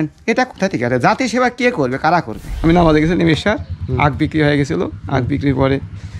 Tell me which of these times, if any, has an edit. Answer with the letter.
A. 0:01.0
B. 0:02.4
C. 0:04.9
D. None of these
B